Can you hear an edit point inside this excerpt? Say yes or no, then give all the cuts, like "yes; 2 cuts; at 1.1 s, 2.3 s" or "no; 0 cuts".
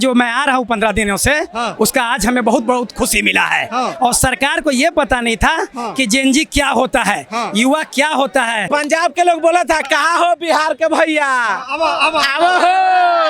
yes; 1 cut; at 8.7 s